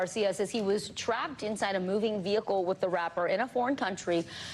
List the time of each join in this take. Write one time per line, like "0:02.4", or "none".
0:02.8